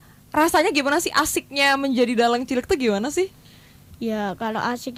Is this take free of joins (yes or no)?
yes